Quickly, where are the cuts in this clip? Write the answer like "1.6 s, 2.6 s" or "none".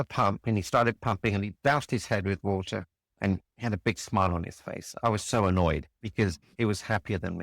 6.1 s